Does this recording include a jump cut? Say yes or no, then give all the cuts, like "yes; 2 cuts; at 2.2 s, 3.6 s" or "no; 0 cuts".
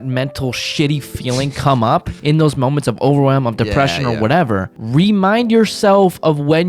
yes; 2 cuts; at 2.1 s, 4.8 s